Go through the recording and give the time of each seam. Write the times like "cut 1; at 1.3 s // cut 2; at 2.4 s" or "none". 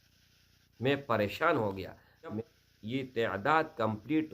cut 1; at 2.4 s